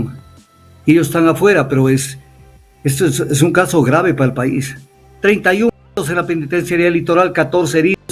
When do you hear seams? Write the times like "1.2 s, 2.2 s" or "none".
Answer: 4.8 s